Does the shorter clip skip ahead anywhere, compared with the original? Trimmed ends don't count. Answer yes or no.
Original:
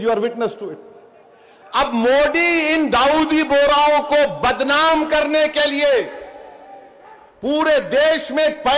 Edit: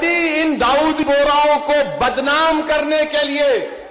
yes